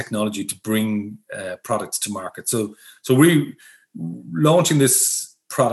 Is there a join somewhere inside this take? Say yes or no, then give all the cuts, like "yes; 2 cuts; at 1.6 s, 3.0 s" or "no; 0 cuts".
no; 0 cuts